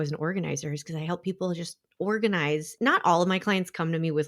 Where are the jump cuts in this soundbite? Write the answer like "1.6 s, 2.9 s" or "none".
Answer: 2.7 s